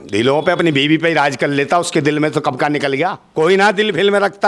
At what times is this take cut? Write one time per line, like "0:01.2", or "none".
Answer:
0:03.2